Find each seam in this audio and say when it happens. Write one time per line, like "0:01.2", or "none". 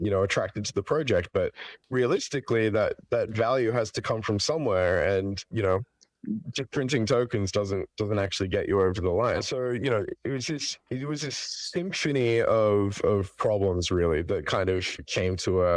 0:09.4